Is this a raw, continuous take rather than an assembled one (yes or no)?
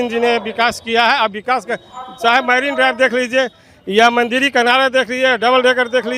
yes